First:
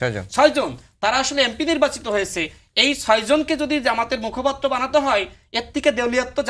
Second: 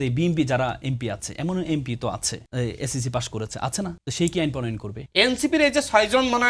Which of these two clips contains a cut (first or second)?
second